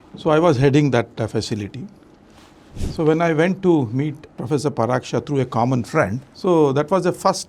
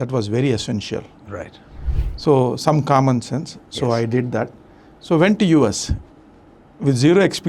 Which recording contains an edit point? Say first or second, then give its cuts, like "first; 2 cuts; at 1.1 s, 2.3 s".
first; 2 cuts; at 4.3 s, 6.3 s